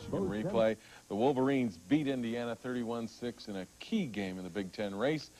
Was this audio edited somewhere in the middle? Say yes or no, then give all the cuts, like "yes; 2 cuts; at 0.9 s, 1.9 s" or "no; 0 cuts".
yes; 1 cut; at 2.5 s